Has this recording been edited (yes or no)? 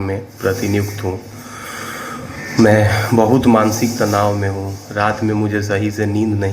no